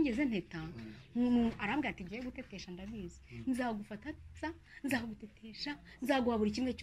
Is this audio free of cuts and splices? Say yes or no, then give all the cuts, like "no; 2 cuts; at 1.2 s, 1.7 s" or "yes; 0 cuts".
yes; 0 cuts